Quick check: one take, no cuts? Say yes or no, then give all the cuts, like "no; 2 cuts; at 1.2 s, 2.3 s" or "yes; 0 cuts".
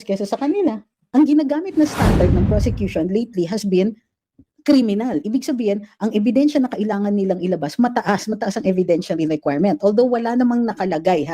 no; 1 cut; at 0.9 s